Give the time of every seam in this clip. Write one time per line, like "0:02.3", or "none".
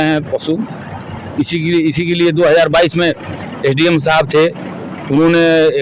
none

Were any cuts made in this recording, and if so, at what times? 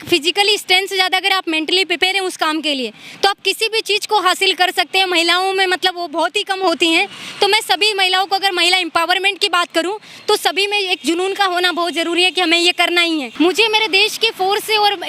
0:13.3

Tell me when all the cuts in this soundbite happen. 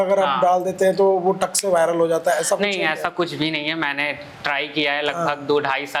none

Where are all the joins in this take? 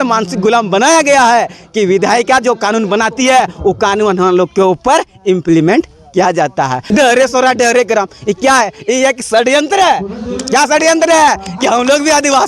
0:06.8

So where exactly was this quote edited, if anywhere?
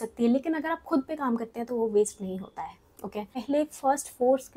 0:03.3

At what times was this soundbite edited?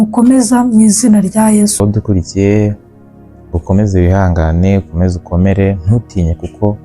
0:01.8

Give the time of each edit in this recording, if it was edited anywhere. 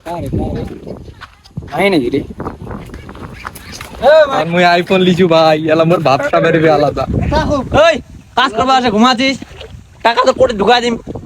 0:04.4
0:07.2

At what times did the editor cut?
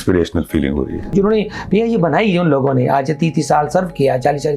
0:01.1

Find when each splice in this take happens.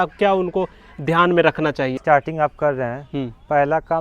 0:02.0

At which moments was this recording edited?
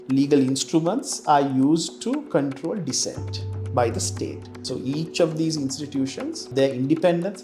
0:04.5
0:06.5

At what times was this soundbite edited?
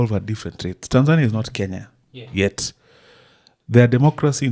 none

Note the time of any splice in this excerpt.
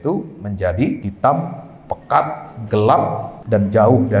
0:01.1
0:03.3

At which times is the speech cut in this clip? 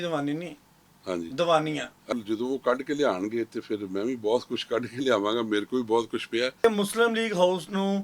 0:02.1
0:06.6

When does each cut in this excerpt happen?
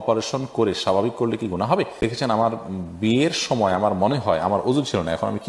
0:02.0

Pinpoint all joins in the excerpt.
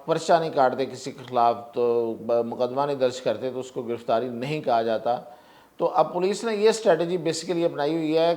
none

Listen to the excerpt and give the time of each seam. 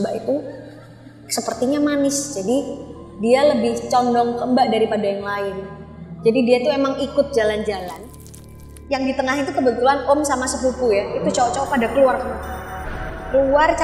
0:08.3

